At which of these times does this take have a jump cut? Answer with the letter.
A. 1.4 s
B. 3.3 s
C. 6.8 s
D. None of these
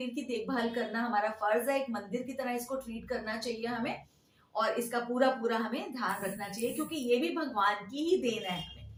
D